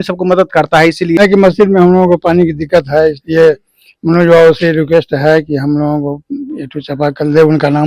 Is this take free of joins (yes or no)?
no